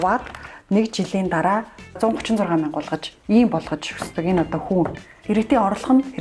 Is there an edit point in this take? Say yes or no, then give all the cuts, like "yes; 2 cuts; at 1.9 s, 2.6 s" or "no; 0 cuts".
yes; 2 cuts; at 2.0 s, 5.1 s